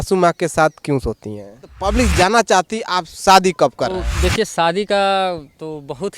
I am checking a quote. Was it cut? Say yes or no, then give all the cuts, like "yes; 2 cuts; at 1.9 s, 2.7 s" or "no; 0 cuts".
yes; 2 cuts; at 1.8 s, 4.1 s